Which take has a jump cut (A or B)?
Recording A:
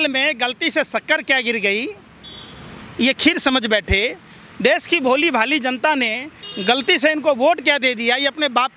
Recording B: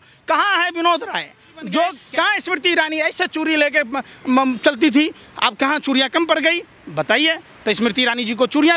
B